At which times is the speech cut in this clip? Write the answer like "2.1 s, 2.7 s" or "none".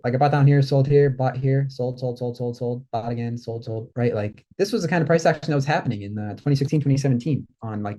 3.9 s